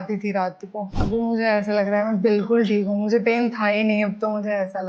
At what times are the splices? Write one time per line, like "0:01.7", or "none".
0:00.9

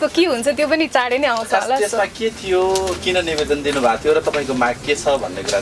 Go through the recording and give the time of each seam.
none

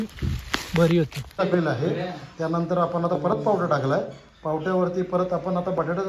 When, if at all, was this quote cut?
0:01.4

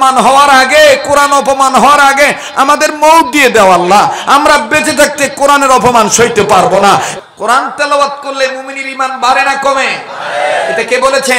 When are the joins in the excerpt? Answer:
0:07.2

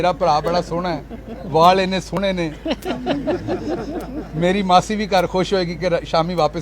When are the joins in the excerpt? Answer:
none

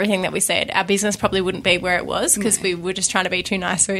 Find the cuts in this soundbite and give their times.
none

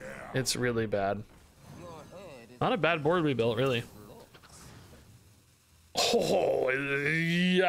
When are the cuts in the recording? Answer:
0:01.4
0:05.2

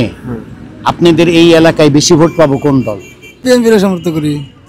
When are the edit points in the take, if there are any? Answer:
0:03.5

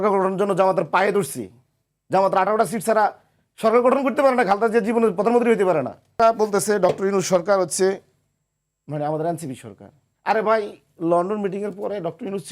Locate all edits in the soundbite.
0:06.2

